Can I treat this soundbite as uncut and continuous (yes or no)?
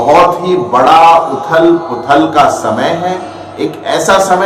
yes